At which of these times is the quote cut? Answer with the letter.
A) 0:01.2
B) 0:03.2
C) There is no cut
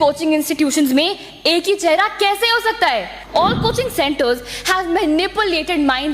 B